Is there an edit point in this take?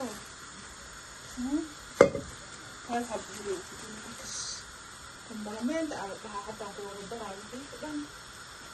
no; 0 cuts

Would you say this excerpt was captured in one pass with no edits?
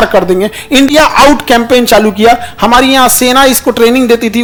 yes; 0 cuts

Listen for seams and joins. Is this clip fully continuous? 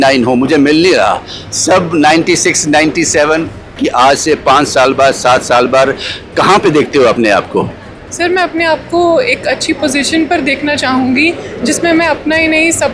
no; 1 cut; at 3.8 s

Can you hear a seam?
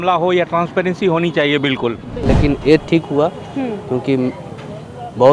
yes; 1 cut; at 2.1 s

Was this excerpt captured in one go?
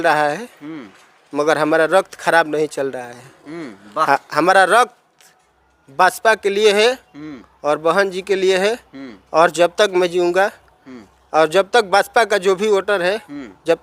yes; 0 cuts

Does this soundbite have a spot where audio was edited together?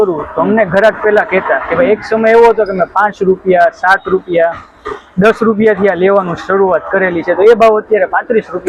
no; 0 cuts

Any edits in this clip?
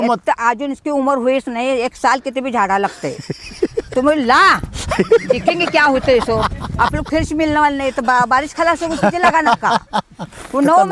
no; 0 cuts

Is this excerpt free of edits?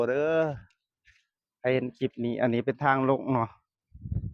yes; 0 cuts

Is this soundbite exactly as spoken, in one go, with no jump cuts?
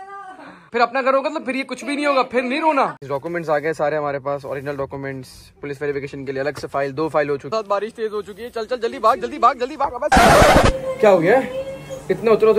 no; 3 cuts; at 3.0 s, 7.5 s, 10.1 s

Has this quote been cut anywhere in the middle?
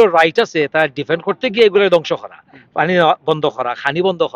no; 0 cuts

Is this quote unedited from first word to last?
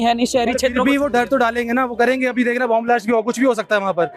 yes; 0 cuts

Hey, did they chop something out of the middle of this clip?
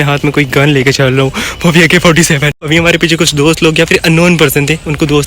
yes; 1 cut; at 2.6 s

